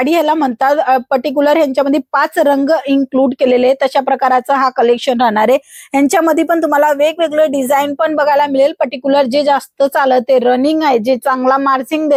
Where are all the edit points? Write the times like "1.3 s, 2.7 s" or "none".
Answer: none